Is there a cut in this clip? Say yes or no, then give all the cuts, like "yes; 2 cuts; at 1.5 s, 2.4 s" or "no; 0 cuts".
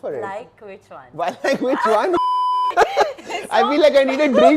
yes; 1 cut; at 2.7 s